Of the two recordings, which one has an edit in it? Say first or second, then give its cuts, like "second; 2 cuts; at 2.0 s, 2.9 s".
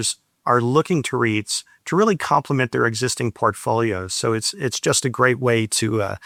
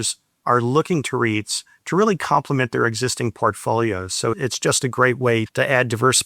second; 2 cuts; at 4.4 s, 5.5 s